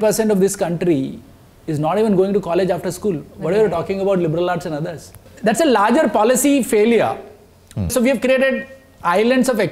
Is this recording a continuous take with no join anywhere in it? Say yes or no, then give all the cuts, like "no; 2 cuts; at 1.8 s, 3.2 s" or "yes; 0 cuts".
no; 2 cuts; at 5.2 s, 7.9 s